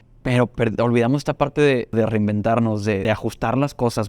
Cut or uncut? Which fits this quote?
cut